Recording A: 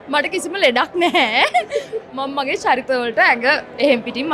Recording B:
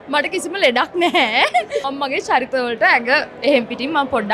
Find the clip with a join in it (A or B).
B